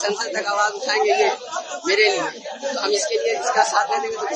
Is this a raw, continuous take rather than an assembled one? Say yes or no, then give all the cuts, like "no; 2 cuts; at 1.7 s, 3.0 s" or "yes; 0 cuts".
yes; 0 cuts